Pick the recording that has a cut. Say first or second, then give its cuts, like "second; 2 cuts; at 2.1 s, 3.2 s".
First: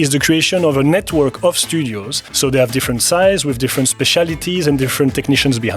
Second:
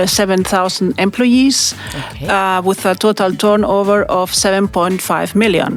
first; 1 cut; at 2.3 s